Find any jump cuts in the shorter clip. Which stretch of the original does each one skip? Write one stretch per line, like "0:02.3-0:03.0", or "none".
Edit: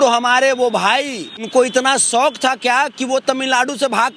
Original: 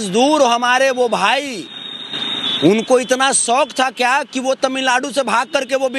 0:01.9-0:02.8